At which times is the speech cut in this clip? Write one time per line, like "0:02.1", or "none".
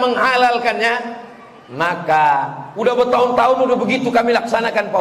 0:02.6